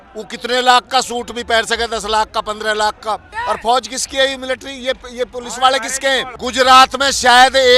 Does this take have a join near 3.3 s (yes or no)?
yes